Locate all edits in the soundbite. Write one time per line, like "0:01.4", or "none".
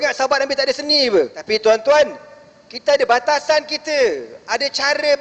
0:01.4